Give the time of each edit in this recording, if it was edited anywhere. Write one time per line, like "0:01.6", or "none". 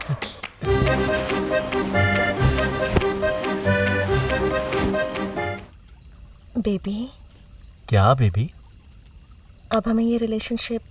0:05.5